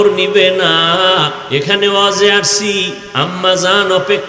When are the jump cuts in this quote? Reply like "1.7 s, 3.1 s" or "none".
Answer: 1.4 s, 3.0 s